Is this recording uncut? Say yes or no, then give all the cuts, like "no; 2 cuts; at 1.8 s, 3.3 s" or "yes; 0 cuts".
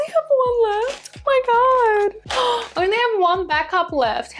yes; 0 cuts